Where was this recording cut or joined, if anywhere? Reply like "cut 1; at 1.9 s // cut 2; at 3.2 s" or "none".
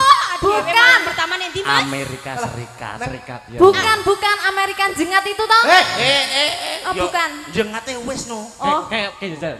none